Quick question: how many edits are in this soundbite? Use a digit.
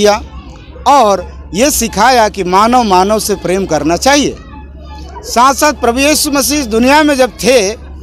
0